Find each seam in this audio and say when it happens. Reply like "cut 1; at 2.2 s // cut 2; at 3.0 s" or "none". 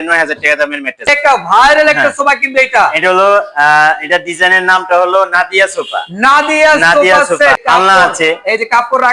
cut 1; at 1.1 s // cut 2; at 7.6 s